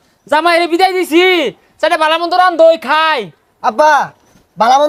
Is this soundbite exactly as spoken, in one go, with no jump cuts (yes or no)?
yes